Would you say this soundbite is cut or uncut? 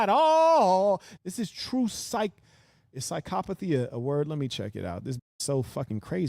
cut